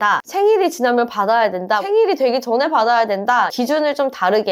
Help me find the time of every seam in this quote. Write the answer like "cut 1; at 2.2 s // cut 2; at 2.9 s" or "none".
cut 1; at 3.5 s